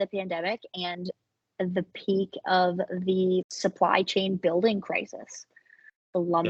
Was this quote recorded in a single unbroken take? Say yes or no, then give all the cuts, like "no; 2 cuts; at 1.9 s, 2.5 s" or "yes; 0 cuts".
yes; 0 cuts